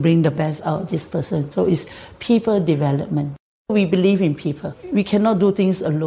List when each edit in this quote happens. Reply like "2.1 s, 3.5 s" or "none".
3.7 s, 4.8 s